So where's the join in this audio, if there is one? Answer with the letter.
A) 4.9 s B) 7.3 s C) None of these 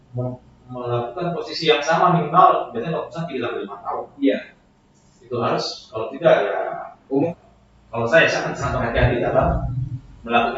B